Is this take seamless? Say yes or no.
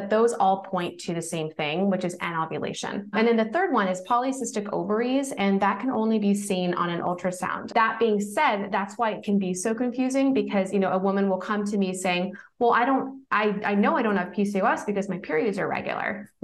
no